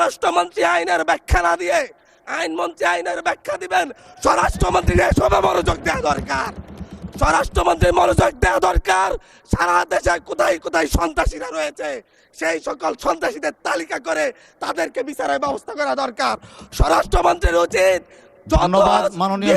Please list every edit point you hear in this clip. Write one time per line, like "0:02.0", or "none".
none